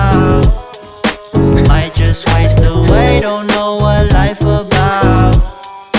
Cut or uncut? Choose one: uncut